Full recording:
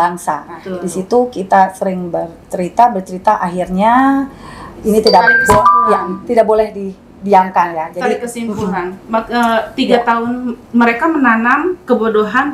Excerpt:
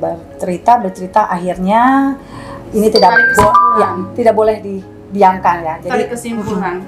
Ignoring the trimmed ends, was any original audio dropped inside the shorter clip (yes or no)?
no